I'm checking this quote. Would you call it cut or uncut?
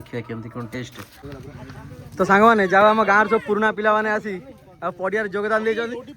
cut